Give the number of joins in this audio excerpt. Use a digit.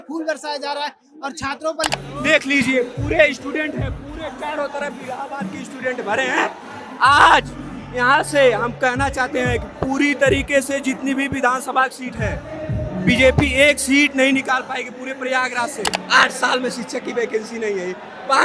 2